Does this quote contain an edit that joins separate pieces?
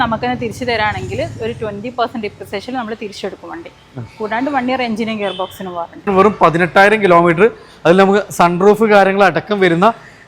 yes; 1 cut; at 6.1 s

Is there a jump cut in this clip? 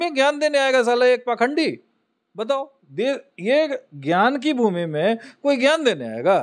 no; 0 cuts

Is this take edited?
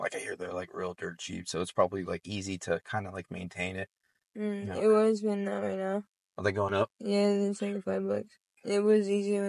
yes; 1 cut; at 8.4 s

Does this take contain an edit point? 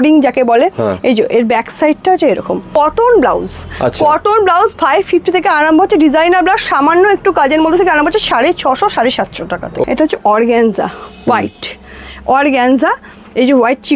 yes; 2 cuts; at 2.7 s, 9.8 s

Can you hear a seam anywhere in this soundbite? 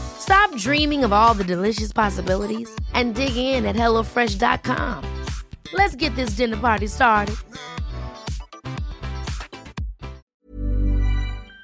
yes; 1 cut; at 10.2 s

